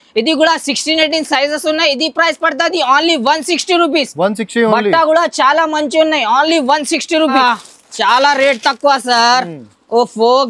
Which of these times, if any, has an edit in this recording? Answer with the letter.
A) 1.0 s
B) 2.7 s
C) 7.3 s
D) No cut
C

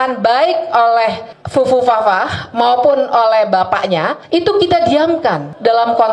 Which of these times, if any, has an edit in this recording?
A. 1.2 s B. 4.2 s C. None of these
B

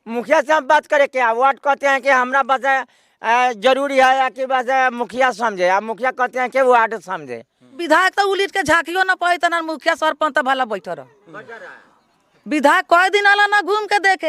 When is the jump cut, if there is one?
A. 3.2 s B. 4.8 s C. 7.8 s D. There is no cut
C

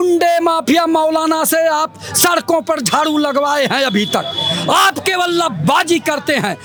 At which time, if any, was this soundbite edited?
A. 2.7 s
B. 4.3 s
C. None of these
C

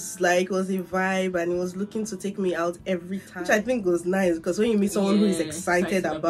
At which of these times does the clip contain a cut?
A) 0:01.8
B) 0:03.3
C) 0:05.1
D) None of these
D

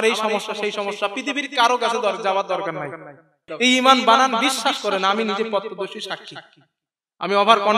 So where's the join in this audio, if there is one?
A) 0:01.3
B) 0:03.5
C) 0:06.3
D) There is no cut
B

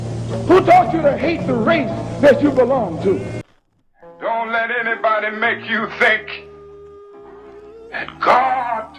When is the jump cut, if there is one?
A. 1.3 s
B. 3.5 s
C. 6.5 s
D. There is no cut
B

